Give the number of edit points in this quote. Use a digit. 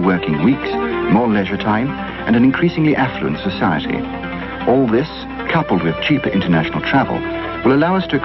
1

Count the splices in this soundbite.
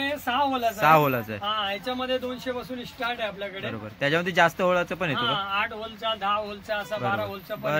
0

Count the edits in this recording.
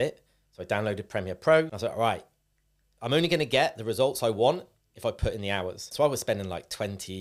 2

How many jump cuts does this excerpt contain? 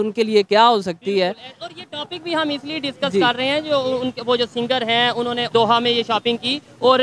0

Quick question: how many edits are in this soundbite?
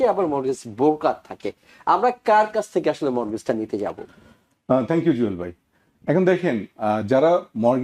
0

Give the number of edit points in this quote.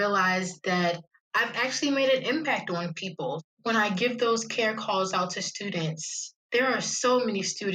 2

